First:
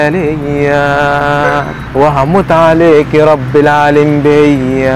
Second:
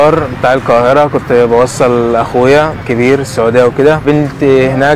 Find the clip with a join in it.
second; 2 cuts; at 2.8 s, 4.0 s

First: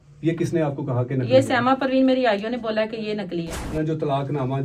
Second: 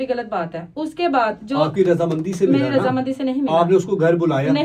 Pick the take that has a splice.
first; 1 cut; at 3.6 s

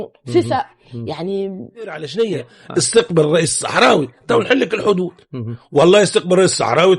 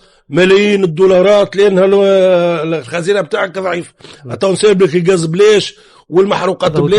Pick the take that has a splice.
first; 1 cut; at 2.1 s

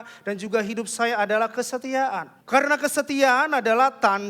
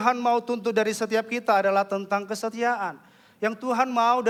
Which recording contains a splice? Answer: first; 1 cut; at 2.3 s

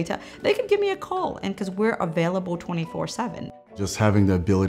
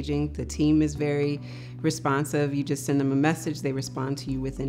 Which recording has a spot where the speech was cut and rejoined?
first; 1 cut; at 3.5 s

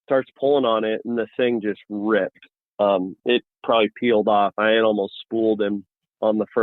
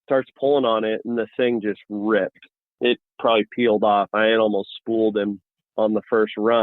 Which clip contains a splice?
second; 1 cut; at 2.7 s

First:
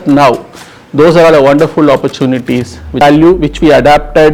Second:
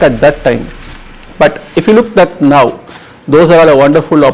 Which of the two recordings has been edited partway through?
first; 1 cut; at 3.0 s

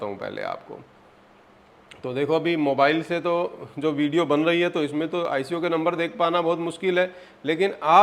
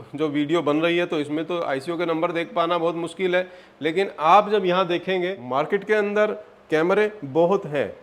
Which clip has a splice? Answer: second; 1 cut; at 5.4 s

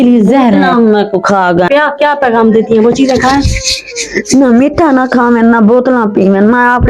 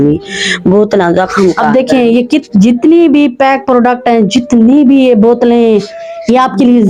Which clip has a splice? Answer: first; 1 cut; at 1.7 s

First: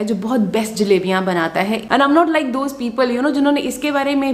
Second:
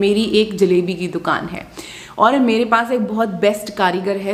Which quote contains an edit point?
first; 1 cut; at 1.8 s

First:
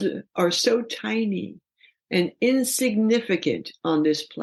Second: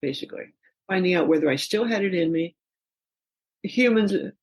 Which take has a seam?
second; 1 cut; at 3.1 s

